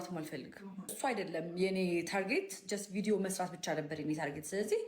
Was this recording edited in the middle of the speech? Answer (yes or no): yes